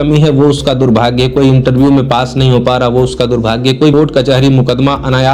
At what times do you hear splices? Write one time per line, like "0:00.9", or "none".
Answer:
0:03.9